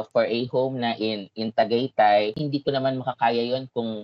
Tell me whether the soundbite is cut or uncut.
uncut